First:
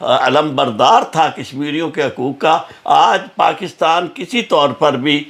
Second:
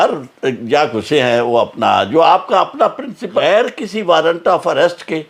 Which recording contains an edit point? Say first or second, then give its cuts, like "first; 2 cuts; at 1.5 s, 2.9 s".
second; 1 cut; at 3.4 s